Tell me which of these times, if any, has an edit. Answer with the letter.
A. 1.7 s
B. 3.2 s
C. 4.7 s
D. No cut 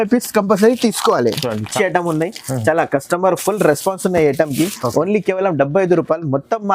A